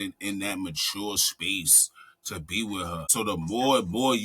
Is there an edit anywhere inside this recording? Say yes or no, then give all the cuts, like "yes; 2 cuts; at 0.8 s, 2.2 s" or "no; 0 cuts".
yes; 1 cut; at 3.0 s